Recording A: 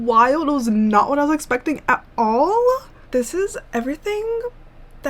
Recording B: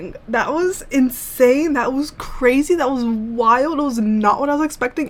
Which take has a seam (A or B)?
A